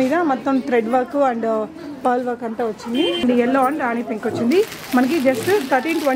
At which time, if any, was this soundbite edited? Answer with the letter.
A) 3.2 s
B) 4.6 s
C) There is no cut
A